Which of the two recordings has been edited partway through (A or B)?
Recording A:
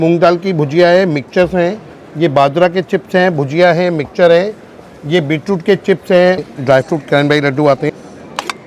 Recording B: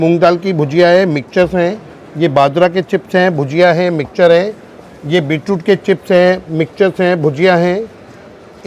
A